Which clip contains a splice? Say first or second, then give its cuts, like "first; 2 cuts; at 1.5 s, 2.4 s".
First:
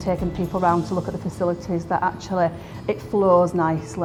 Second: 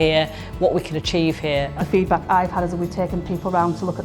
second; 1 cut; at 1.8 s